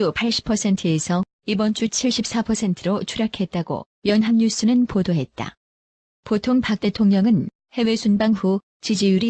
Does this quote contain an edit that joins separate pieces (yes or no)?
yes